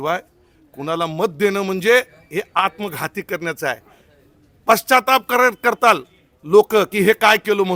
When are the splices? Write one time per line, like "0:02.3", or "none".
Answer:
none